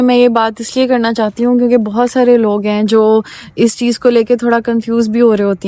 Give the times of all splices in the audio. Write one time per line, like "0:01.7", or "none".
none